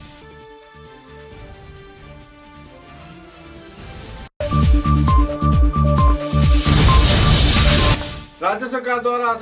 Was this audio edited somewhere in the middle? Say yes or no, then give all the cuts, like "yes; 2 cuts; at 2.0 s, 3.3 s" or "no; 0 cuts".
yes; 1 cut; at 8.0 s